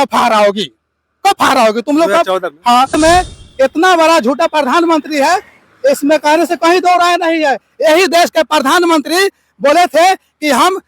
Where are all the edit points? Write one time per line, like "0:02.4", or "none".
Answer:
0:02.9